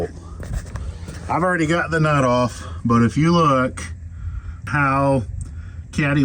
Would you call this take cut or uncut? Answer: cut